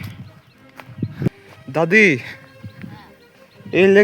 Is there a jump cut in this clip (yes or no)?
yes